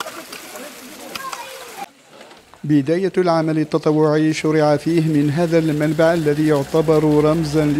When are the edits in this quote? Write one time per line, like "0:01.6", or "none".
none